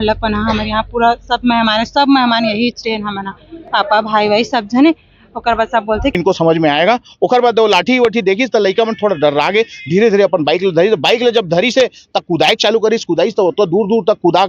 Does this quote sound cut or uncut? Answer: cut